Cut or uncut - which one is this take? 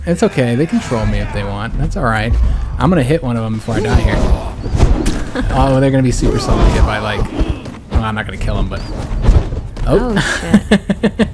uncut